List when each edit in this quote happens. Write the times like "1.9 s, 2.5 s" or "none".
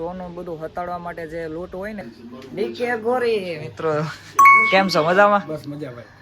2.1 s